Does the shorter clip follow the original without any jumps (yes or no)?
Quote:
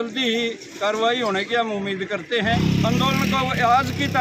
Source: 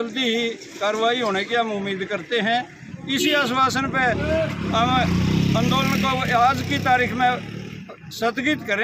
no